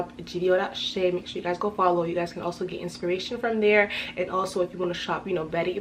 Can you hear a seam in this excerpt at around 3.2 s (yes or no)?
no